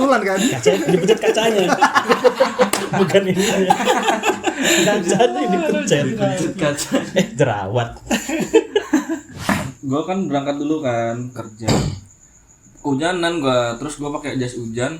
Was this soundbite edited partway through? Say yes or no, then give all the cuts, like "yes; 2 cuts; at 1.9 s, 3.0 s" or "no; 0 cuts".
yes; 1 cut; at 9.5 s